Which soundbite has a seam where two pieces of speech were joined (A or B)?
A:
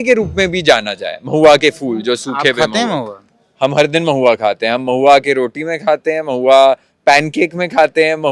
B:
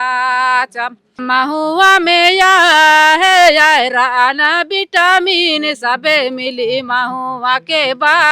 B